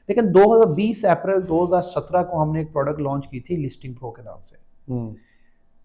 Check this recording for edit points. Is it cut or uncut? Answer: uncut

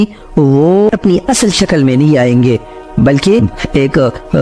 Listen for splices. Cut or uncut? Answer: uncut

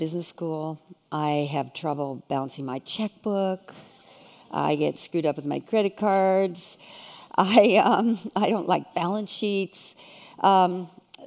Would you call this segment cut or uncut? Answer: cut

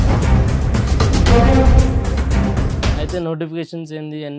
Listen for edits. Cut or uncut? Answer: cut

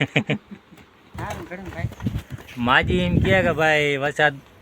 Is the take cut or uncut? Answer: cut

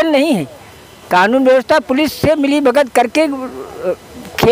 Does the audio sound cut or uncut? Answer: uncut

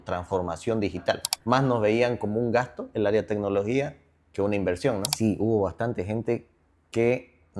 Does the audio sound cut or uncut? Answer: cut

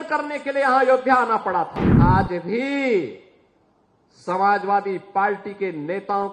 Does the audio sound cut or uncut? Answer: cut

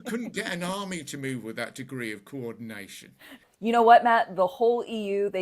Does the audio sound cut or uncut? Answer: cut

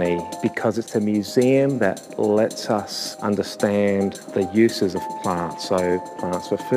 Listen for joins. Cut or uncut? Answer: cut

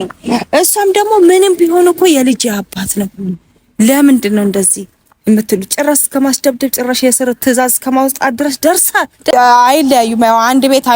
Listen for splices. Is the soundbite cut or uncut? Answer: cut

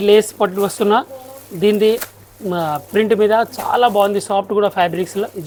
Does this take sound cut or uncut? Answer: uncut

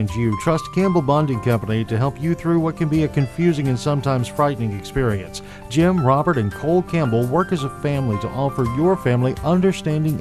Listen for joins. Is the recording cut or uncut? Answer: uncut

